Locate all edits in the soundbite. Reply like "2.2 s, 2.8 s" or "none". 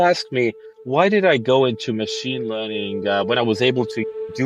none